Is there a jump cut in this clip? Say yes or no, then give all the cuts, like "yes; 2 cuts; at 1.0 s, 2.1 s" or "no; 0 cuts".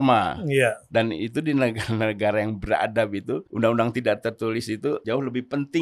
yes; 2 cuts; at 3.5 s, 5.0 s